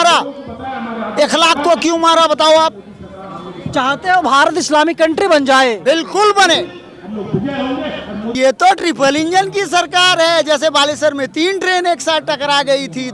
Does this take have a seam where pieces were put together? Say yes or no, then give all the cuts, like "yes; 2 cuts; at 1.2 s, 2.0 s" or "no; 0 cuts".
yes; 1 cut; at 8.3 s